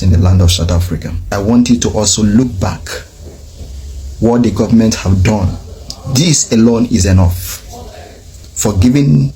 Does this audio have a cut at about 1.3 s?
yes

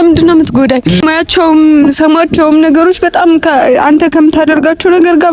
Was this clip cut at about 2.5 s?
no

